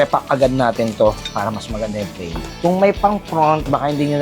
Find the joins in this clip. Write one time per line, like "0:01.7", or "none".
0:02.5